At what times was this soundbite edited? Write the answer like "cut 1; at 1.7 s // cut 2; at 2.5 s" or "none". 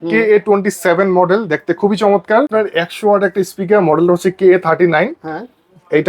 cut 1; at 2.5 s